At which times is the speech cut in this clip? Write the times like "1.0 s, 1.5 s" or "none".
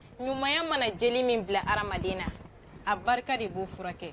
none

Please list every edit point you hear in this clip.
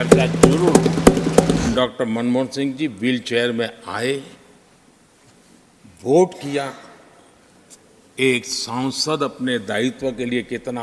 1.6 s

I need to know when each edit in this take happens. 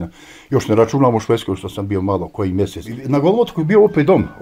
2.9 s

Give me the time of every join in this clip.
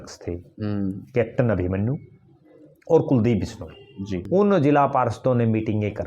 4.2 s

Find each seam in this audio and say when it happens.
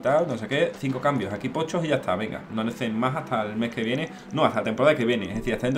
none

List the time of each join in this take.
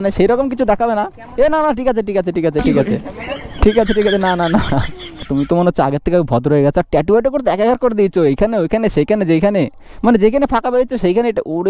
1.2 s, 5.3 s

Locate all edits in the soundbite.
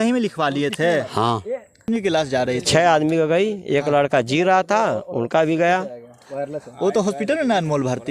1.9 s

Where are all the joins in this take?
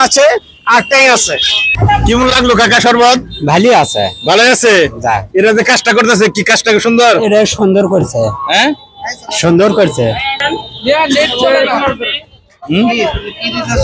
none

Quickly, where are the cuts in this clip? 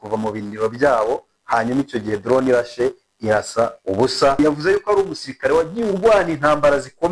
4.4 s

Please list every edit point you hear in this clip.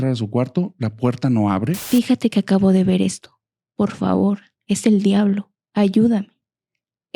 1.8 s

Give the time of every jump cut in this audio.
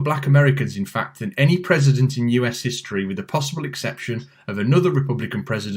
none

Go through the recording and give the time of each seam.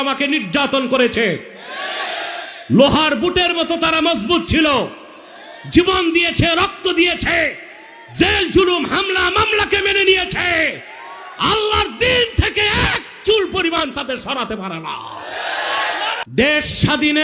16.2 s

